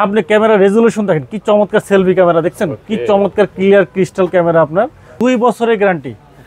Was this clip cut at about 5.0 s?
yes; 1 cut; at 5.0 s

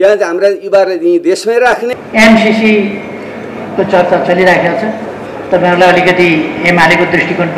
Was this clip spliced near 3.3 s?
no; 1 cut; at 2.0 s

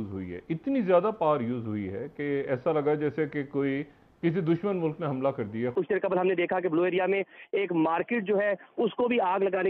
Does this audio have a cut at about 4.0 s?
no; 1 cut; at 5.7 s

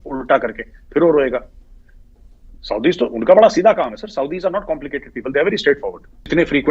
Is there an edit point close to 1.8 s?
no; 0 cuts

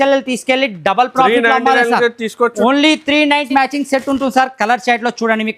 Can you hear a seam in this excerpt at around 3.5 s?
yes; 1 cut; at 3.5 s

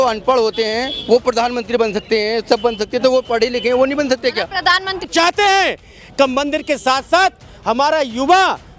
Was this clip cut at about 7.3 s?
no; 1 cut; at 5.0 s

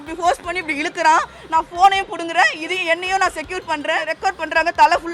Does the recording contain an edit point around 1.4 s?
no; 1 cut; at 4.1 s

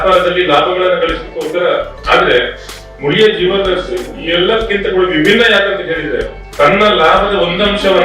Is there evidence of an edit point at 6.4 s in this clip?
yes; 2 cuts; at 2.0 s, 6.4 s

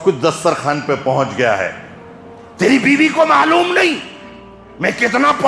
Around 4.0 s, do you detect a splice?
no; 0 cuts

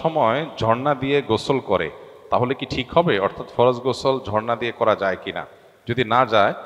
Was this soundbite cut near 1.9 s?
no; 0 cuts

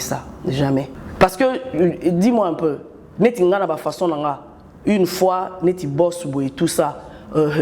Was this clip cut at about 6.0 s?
no; 1 cut; at 1.0 s

